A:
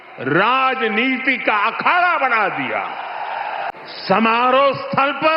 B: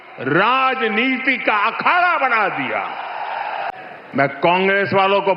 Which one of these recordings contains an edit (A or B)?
B